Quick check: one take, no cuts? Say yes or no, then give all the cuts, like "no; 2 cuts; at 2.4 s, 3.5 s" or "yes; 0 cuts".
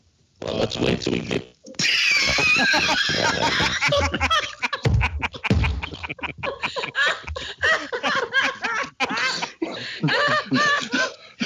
yes; 0 cuts